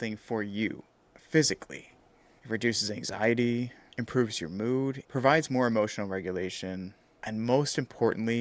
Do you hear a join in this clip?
yes; 1 cut; at 5.0 s

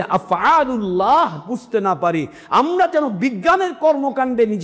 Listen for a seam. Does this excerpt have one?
no; 0 cuts

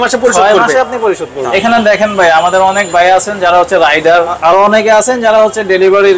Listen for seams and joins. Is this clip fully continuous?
no; 2 cuts; at 1.5 s, 4.4 s

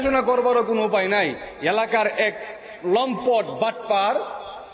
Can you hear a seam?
yes; 1 cut; at 1.5 s

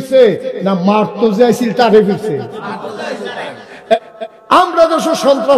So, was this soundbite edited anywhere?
yes; 1 cut; at 4.0 s

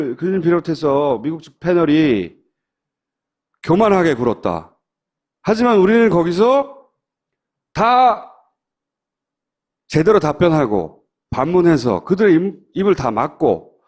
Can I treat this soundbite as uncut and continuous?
no; 1 cut; at 11.2 s

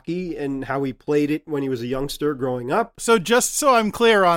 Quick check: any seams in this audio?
yes; 1 cut; at 3.0 s

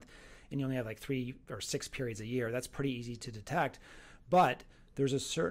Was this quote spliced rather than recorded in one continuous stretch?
no; 0 cuts

